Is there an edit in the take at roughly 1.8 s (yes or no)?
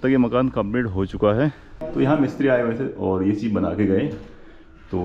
yes